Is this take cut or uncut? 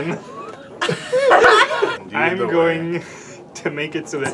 cut